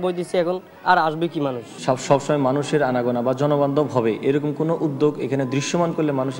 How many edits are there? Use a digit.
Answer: 1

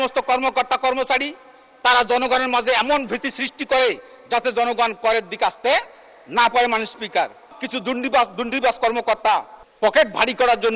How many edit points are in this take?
2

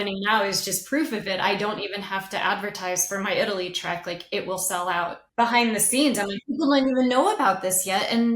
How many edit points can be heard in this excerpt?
1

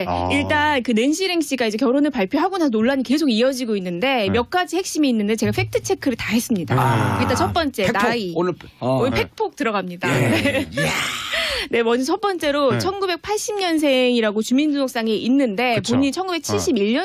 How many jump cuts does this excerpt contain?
1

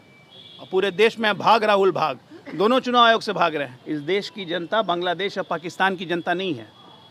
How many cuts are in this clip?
1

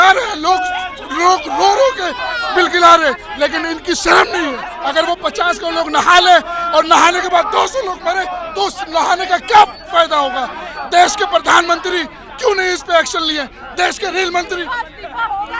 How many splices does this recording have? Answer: 1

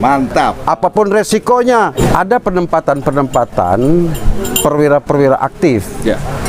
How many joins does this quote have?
1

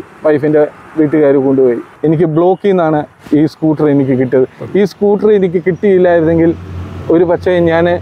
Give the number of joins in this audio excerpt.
1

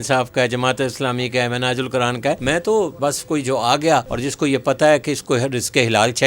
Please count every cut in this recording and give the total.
3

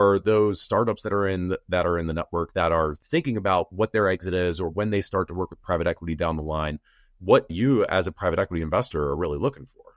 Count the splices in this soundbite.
1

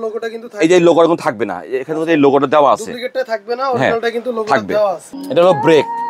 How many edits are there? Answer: 1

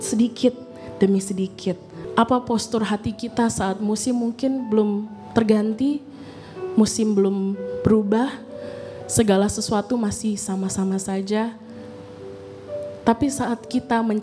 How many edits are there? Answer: 1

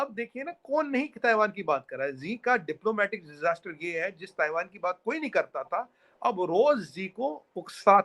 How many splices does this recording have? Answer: 0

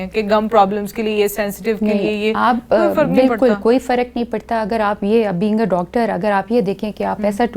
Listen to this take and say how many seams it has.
0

